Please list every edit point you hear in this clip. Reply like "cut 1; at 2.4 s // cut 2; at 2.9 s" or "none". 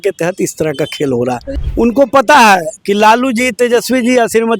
cut 1; at 1.5 s